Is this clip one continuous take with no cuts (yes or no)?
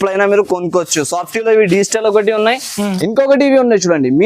no